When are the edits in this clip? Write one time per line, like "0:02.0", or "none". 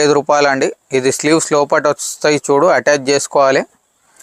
none